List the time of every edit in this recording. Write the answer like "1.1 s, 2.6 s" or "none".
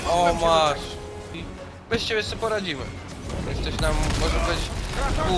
1.4 s